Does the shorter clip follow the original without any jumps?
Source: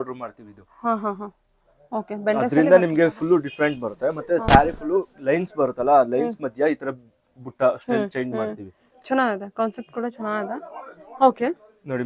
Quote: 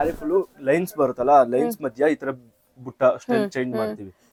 yes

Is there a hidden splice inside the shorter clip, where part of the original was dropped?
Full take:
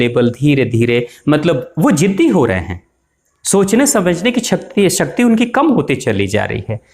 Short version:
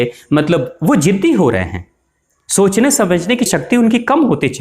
yes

